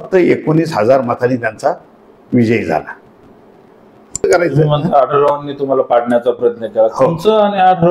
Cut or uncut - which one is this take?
cut